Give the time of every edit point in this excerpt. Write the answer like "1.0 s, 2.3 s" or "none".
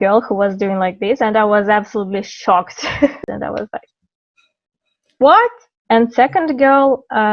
3.2 s, 5.6 s